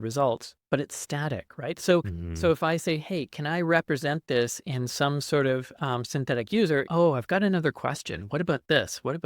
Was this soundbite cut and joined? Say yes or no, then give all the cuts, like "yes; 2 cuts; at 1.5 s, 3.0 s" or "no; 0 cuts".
yes; 1 cut; at 6.9 s